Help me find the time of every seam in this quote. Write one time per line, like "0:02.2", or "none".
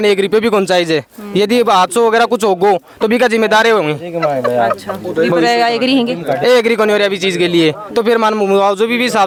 none